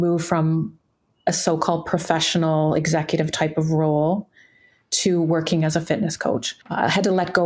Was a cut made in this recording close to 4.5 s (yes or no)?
no